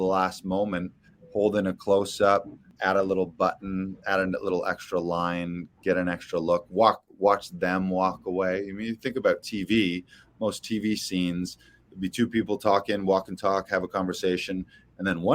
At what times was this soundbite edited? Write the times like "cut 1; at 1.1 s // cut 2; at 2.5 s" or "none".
cut 1; at 2.7 s